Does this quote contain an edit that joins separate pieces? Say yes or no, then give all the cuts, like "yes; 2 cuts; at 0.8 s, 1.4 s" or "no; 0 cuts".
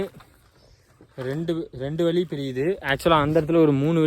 no; 0 cuts